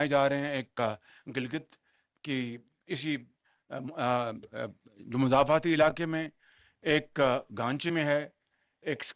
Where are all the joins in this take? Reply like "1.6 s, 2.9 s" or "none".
none